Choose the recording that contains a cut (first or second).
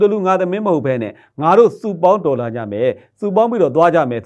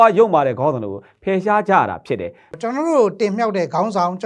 second